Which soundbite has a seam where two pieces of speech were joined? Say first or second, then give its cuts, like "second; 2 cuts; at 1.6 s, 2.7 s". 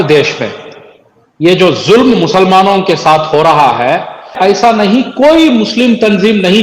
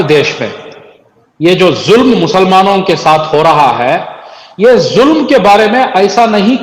first; 1 cut; at 4.4 s